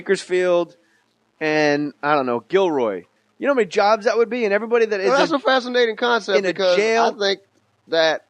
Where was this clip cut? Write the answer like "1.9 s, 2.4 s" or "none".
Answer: 4.9 s